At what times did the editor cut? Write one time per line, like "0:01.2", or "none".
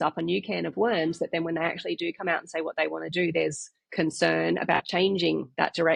none